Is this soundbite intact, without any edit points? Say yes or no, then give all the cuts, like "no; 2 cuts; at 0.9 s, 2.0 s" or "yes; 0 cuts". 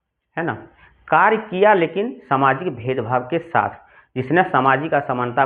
yes; 0 cuts